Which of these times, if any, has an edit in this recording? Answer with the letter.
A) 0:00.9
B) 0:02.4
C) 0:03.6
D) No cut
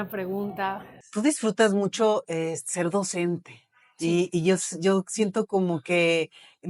A